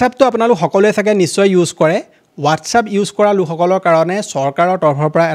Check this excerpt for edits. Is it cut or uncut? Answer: uncut